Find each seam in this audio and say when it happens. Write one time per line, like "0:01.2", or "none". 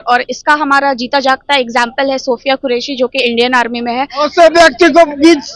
0:04.2